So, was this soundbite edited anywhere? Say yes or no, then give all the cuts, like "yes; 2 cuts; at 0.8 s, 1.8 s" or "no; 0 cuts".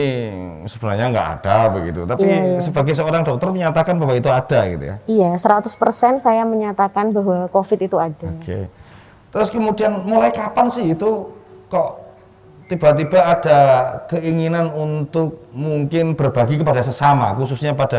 no; 0 cuts